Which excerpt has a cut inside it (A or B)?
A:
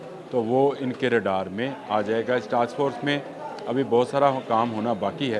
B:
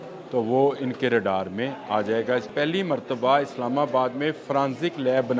B